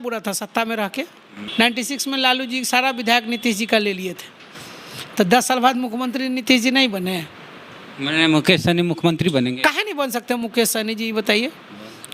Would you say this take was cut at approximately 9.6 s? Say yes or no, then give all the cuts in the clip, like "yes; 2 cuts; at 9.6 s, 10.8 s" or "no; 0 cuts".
yes; 2 cuts; at 1.4 s, 9.6 s